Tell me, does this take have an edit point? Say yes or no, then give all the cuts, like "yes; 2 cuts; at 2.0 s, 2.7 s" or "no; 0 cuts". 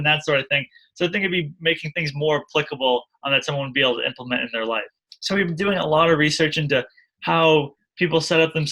yes; 1 cut; at 5.0 s